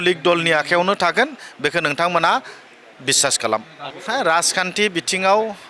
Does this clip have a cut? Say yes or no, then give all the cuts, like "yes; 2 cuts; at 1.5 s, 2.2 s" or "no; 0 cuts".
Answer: yes; 1 cut; at 3.9 s